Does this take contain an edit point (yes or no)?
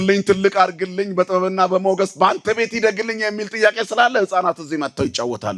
no